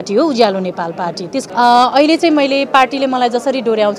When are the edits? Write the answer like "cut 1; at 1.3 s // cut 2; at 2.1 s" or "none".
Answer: cut 1; at 1.5 s